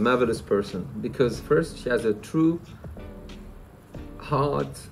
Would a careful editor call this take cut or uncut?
uncut